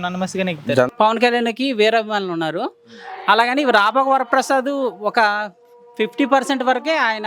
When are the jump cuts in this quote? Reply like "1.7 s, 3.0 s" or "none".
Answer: 0.9 s